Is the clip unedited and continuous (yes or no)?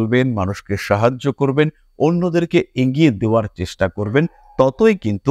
yes